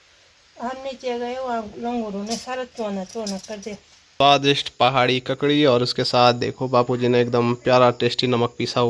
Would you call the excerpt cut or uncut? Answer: cut